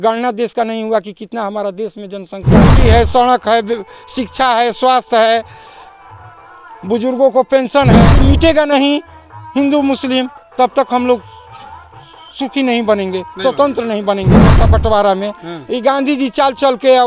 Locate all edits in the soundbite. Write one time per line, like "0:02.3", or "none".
0:02.8
0:08.1
0:14.6